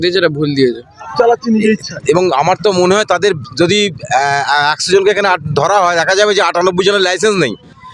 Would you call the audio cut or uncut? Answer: cut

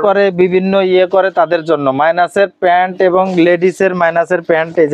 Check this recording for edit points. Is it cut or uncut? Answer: uncut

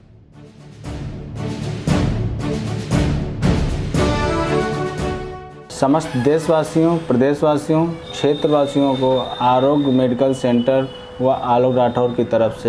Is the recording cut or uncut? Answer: uncut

